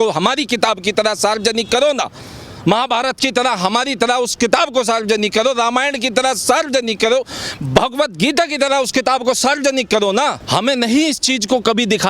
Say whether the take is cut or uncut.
cut